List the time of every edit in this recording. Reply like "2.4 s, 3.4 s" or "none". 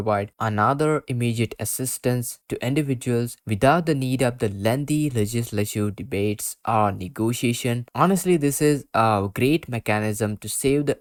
none